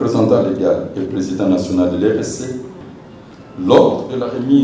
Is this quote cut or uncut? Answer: cut